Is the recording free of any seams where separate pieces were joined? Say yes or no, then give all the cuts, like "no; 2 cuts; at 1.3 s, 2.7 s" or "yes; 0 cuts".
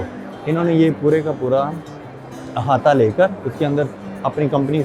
yes; 0 cuts